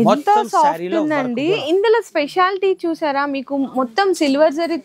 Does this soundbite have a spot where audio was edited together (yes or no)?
no